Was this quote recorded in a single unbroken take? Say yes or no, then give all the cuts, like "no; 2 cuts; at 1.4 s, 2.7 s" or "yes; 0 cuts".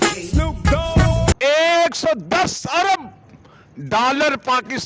no; 1 cut; at 1.3 s